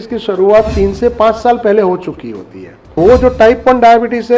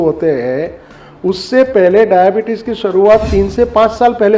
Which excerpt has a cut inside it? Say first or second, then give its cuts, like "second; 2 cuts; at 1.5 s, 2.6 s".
first; 1 cut; at 3.0 s